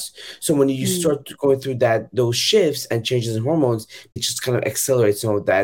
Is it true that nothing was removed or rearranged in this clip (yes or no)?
no